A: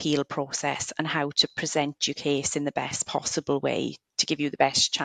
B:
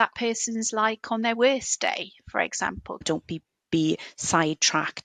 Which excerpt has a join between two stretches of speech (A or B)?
B